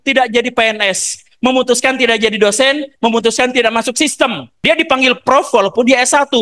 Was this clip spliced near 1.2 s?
no; 1 cut; at 4.5 s

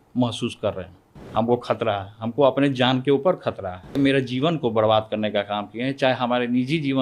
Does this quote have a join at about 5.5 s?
no; 2 cuts; at 1.1 s, 4.0 s

